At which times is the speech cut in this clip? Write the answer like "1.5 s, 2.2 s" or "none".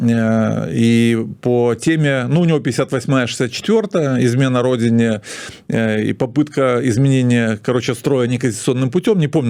none

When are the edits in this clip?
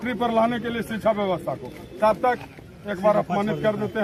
none

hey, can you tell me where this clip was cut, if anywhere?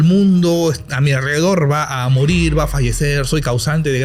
none

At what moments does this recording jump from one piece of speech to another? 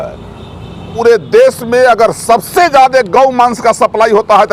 0.9 s

